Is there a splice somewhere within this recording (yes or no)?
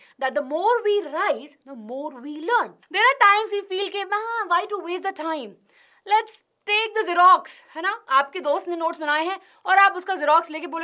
yes